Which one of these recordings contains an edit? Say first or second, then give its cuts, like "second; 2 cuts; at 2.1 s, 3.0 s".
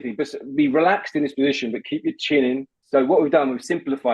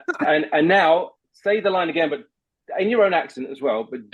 first; 1 cut; at 2.8 s